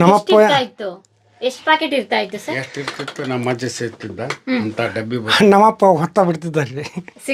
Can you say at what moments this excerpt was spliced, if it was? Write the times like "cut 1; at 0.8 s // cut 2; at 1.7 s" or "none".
none